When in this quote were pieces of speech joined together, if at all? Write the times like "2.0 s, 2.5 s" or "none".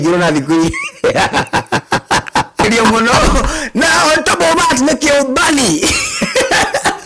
2.6 s